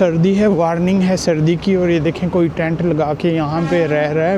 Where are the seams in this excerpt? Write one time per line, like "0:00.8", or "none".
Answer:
none

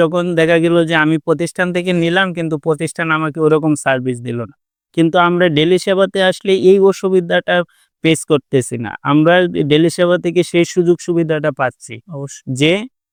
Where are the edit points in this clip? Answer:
none

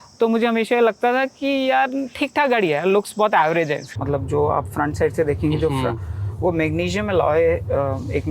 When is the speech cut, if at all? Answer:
0:03.9

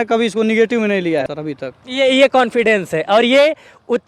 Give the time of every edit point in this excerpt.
0:01.3

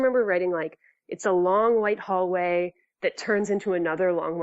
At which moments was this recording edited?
0:02.8

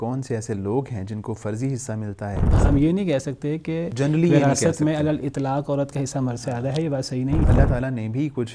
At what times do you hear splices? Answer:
0:02.6
0:07.5

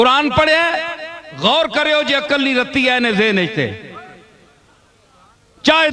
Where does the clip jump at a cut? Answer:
none

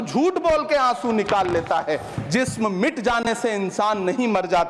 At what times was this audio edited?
0:02.1

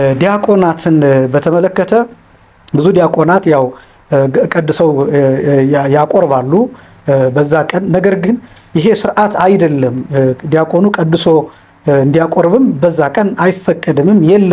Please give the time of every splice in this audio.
none

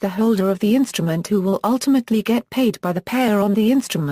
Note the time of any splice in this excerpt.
0:02.3

